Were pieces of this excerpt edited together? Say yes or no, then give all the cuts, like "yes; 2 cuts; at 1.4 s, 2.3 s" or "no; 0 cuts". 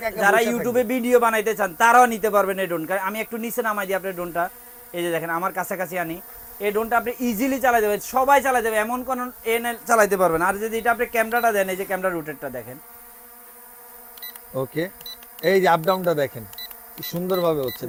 no; 0 cuts